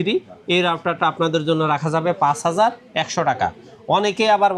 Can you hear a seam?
no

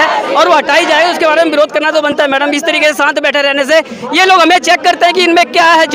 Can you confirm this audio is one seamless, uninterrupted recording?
yes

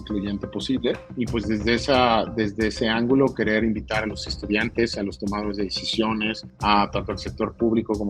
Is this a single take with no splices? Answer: no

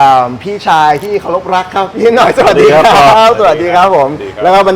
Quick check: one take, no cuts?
yes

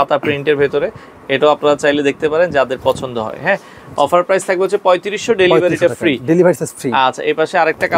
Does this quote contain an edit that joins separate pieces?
no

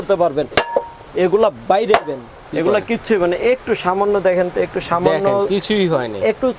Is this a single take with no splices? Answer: yes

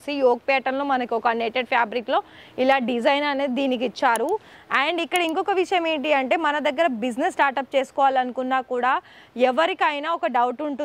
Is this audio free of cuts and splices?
yes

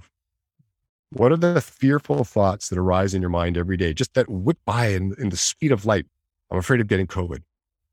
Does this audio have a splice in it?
yes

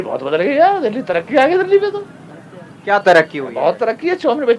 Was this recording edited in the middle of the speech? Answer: no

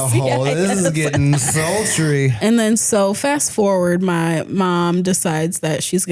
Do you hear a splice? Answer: yes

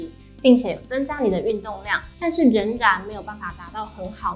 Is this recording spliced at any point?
no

